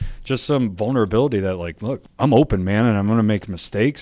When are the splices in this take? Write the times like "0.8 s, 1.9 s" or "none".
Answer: 2.1 s